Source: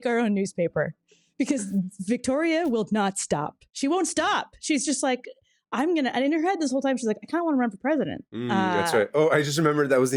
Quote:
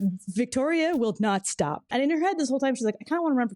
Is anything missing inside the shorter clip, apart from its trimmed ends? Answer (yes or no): yes